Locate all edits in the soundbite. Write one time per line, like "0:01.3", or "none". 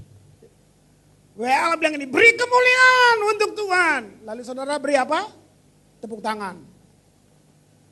none

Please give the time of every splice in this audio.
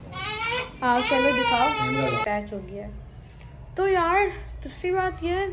0:02.2

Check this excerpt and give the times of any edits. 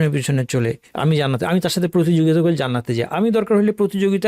none

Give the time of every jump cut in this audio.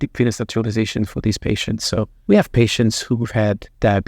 0:02.2

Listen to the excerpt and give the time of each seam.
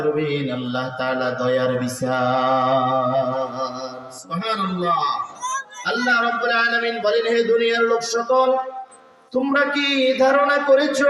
0:05.4

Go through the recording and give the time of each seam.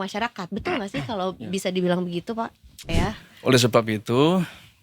0:02.9

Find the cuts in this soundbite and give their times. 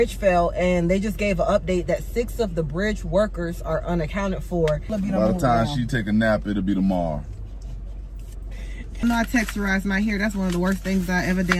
0:04.9
0:09.0

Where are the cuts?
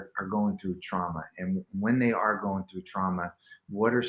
none

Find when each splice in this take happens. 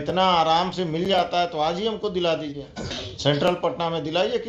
0:03.1

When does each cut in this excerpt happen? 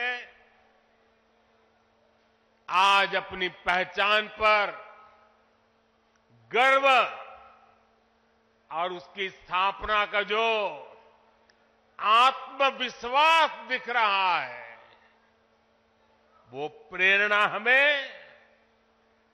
none

